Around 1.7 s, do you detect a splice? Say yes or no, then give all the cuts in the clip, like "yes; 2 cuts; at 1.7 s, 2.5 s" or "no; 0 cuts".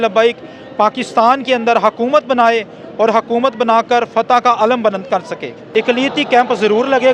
no; 1 cut; at 5.6 s